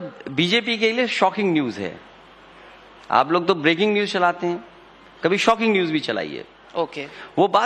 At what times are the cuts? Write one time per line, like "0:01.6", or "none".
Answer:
0:03.3

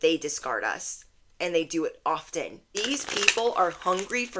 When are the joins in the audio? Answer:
0:02.6

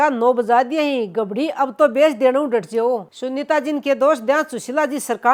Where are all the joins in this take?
none

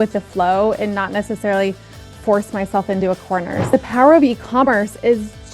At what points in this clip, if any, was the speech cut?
0:03.7

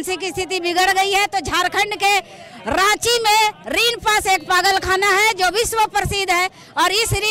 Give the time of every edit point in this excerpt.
none

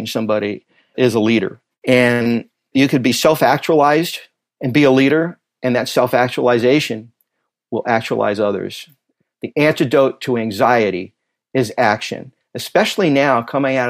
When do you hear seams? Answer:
0:00.9

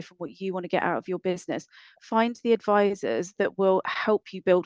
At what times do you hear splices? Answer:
none

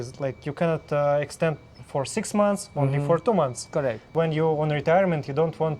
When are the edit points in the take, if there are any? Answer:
0:04.0

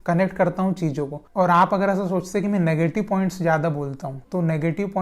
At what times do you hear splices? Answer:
0:01.2

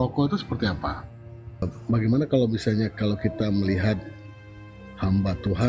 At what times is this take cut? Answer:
0:01.6

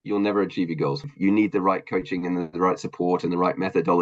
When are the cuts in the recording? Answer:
0:01.1

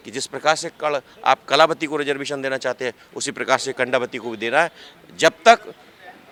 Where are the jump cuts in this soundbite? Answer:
none

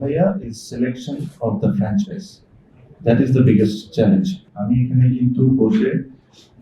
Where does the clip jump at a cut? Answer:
0:04.4

